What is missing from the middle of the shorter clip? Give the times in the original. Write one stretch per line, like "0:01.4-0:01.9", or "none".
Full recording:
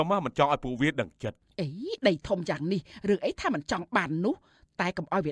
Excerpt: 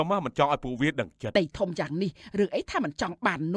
0:01.3-0:02.0